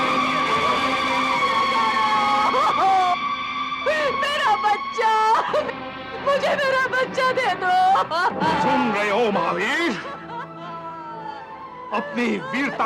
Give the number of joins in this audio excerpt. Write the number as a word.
one